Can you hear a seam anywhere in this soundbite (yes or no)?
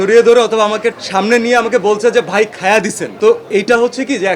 no